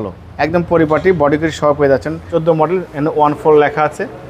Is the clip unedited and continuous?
no; 1 cut; at 2.2 s

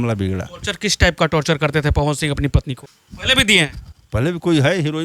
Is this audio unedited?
no; 1 cut; at 2.8 s

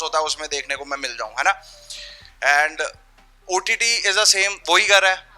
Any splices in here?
no; 0 cuts

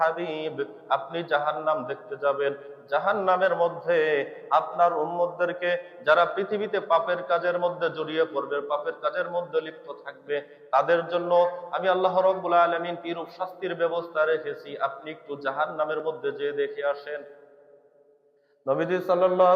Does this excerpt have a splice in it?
no; 0 cuts

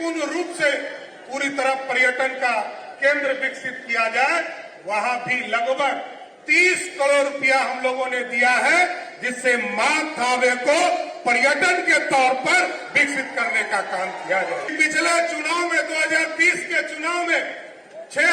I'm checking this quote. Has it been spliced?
yes; 1 cut; at 14.7 s

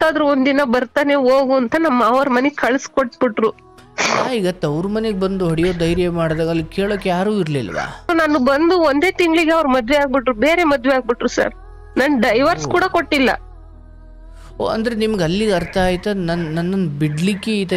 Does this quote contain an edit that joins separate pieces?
yes; 1 cut; at 8.1 s

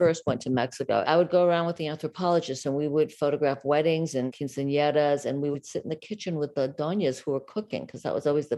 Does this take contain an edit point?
yes; 3 cuts; at 1.0 s, 4.3 s, 5.5 s

